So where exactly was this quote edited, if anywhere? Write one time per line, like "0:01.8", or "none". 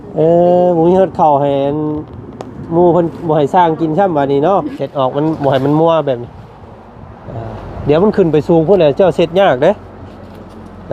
0:04.7